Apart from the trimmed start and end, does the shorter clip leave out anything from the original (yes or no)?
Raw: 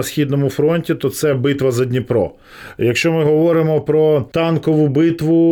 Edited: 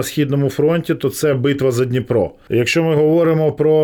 yes